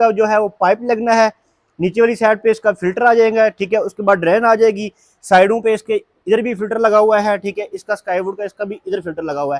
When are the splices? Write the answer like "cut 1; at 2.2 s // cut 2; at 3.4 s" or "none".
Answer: none